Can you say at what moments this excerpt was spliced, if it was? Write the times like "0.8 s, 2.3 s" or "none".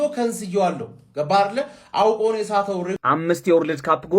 3.0 s